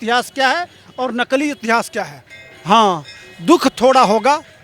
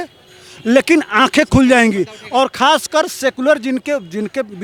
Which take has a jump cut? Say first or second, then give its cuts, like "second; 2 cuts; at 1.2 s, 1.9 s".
first; 1 cut; at 2.3 s